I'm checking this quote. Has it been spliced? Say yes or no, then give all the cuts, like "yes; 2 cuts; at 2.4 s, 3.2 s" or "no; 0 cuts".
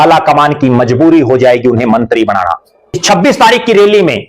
yes; 1 cut; at 3.0 s